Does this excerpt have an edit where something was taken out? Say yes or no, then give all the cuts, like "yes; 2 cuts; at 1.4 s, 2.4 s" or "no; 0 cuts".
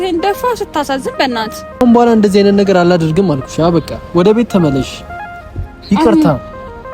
yes; 1 cut; at 1.6 s